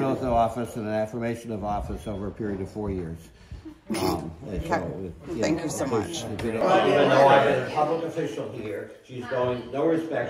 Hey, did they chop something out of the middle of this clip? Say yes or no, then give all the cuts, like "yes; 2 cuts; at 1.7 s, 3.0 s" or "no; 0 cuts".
yes; 1 cut; at 6.6 s